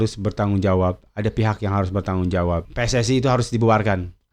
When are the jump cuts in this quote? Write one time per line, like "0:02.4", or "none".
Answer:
0:02.6